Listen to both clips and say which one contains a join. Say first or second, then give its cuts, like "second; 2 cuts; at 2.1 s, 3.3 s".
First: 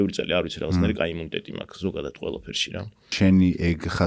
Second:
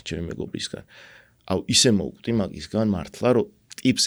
first; 1 cut; at 3.1 s